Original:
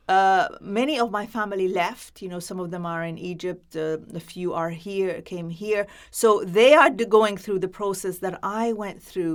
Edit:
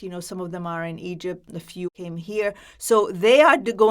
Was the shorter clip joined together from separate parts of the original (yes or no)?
yes